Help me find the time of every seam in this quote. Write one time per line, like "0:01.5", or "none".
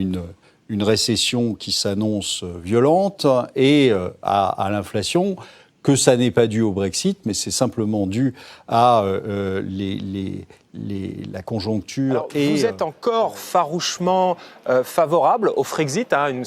0:12.7